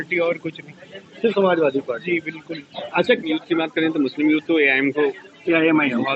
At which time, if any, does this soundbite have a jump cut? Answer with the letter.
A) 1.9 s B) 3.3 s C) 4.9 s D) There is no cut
B